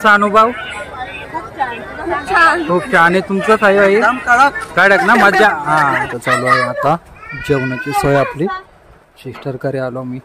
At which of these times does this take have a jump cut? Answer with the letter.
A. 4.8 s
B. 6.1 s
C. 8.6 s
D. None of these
B